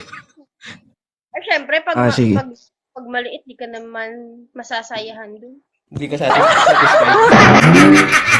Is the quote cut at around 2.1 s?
no; 1 cut; at 7.3 s

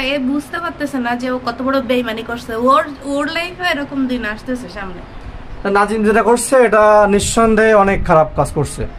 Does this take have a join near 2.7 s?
no; 0 cuts

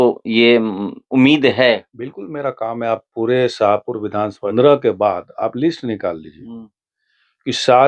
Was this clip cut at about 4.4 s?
yes; 1 cut; at 4.4 s

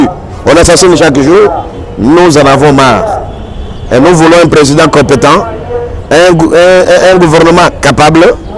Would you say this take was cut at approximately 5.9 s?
no; 0 cuts

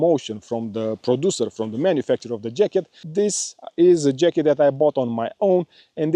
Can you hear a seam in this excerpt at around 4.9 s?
no; 1 cut; at 3.0 s

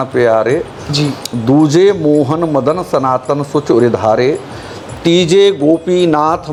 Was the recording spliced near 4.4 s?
no; 0 cuts

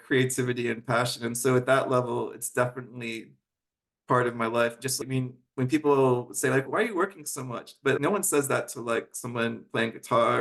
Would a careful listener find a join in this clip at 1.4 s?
no; 3 cuts; at 5.0 s, 6.7 s, 8.0 s

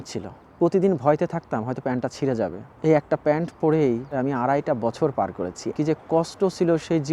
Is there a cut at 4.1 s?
yes; 2 cuts; at 4.1 s, 5.7 s

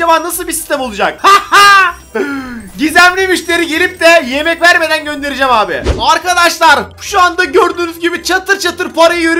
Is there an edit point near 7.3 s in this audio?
no; 2 cuts; at 1.2 s, 5.9 s

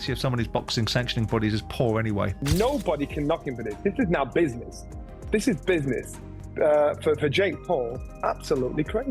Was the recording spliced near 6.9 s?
no; 1 cut; at 2.4 s

